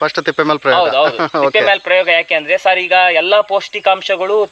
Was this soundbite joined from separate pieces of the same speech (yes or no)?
no